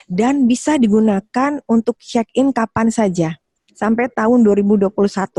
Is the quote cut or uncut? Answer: uncut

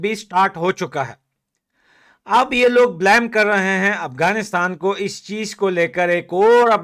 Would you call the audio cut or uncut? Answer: uncut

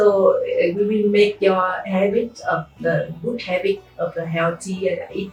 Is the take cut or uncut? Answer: uncut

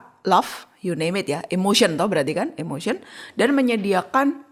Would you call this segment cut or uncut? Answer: uncut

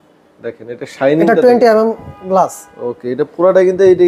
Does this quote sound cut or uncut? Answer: uncut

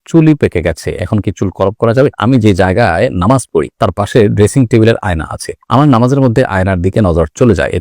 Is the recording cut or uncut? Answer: cut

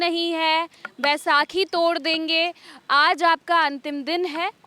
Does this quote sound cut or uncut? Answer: uncut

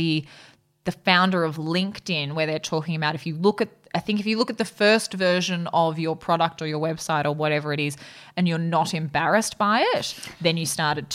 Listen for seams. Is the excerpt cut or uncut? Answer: uncut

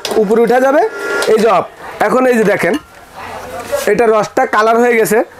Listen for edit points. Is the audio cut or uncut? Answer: uncut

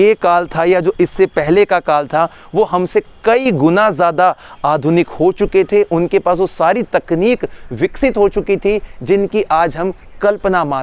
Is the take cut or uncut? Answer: uncut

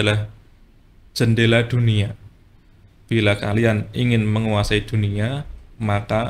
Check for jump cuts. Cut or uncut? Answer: uncut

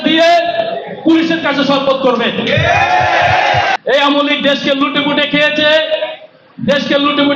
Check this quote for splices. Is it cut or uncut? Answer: cut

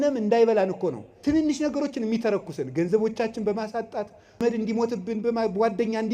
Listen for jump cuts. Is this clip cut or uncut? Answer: cut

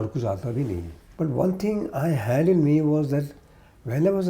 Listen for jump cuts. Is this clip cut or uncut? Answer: uncut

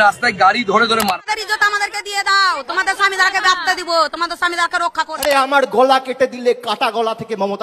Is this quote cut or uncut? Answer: cut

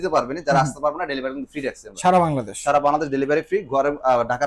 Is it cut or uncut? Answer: uncut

